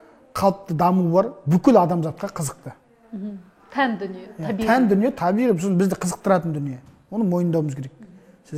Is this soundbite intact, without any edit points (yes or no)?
yes